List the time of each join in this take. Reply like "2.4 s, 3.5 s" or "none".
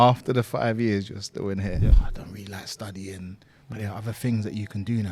2.1 s